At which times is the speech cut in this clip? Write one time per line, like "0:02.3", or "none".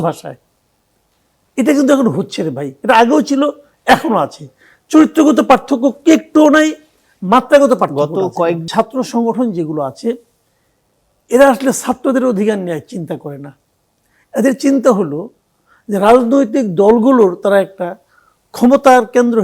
0:08.7